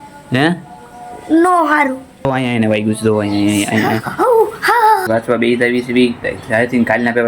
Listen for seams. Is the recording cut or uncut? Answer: cut